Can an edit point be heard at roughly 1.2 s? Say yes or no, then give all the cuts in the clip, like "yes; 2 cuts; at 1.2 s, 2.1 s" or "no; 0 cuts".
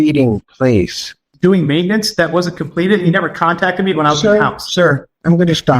yes; 1 cut; at 1.2 s